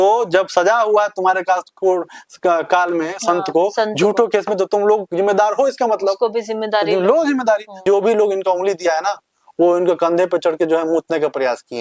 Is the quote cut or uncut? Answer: cut